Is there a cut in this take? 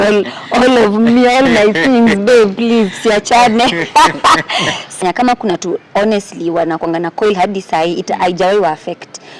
yes; 1 cut; at 5.0 s

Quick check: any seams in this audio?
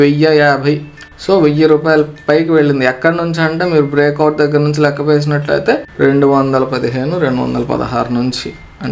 no; 0 cuts

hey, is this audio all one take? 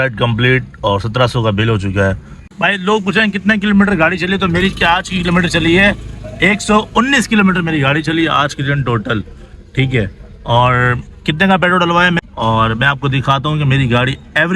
no; 2 cuts; at 2.4 s, 12.2 s

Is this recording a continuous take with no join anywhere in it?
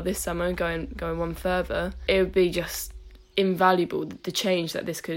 no; 2 cuts; at 2.0 s, 4.2 s

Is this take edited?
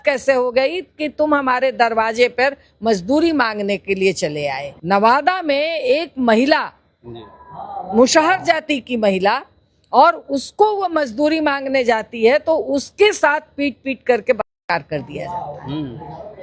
yes; 1 cut; at 4.7 s

